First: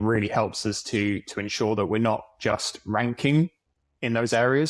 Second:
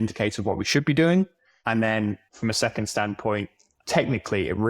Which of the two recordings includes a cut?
second; 2 cuts; at 2.3 s, 3.6 s

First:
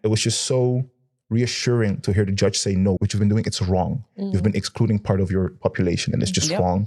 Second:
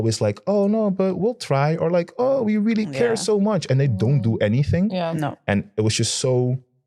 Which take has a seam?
first; 1 cut; at 3.0 s

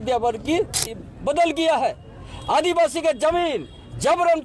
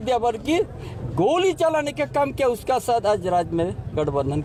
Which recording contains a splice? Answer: first; 1 cut; at 1.0 s

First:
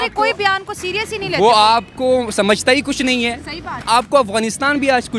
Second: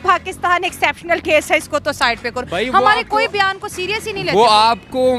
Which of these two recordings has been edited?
first; 1 cut; at 3.8 s

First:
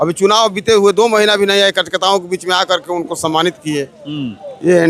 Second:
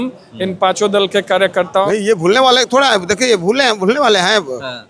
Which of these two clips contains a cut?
second; 1 cut; at 1.9 s

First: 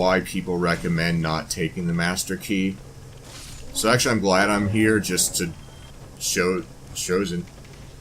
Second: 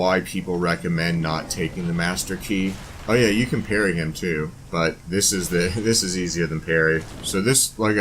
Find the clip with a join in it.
second; 3 cuts; at 2.9 s, 4.6 s, 7.2 s

